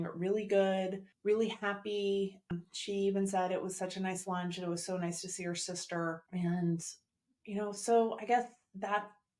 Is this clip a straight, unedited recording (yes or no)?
no